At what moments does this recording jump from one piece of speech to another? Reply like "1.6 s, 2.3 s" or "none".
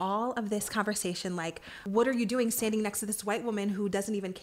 1.7 s